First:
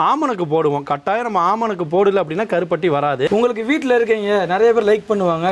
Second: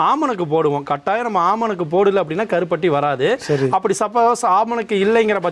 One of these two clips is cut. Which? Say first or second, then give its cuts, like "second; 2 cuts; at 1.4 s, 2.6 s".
first; 1 cut; at 3.3 s